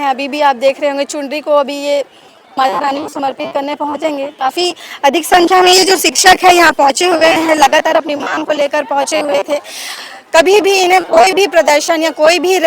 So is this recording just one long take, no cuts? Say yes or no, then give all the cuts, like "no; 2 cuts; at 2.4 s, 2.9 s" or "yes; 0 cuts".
yes; 0 cuts